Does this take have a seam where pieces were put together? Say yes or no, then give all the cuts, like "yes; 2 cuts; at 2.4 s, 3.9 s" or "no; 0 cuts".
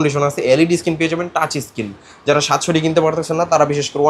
no; 0 cuts